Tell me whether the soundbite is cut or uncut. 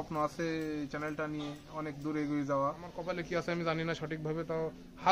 cut